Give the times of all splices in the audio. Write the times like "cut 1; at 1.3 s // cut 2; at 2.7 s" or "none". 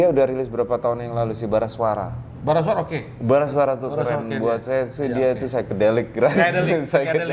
none